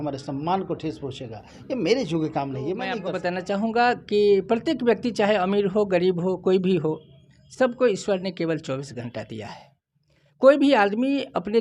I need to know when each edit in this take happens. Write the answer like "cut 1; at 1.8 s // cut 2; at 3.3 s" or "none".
cut 1; at 3.1 s